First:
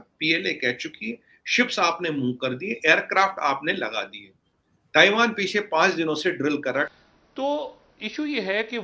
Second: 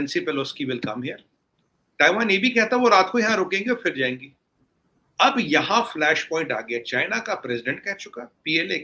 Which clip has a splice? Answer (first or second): first